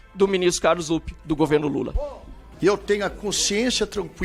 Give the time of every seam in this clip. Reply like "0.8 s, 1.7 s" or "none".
none

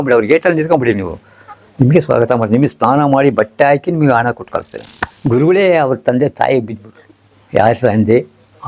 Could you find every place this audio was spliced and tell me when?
5.1 s

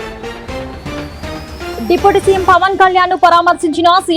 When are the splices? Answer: 1.7 s

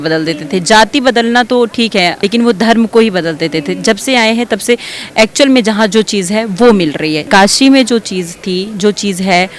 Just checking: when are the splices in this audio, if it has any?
2.2 s, 7.2 s

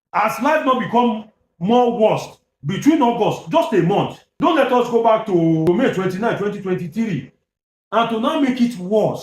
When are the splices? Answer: 4.2 s, 5.7 s

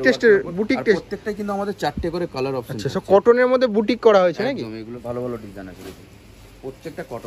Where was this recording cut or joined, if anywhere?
5.0 s

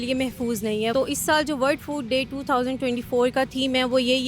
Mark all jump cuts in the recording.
0.9 s

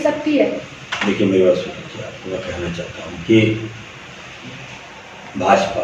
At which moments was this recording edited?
none

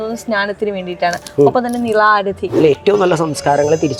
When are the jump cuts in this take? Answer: 2.6 s

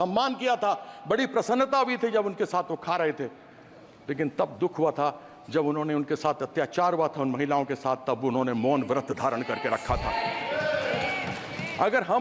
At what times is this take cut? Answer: none

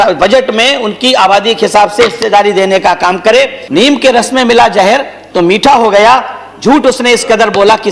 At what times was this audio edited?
3.6 s

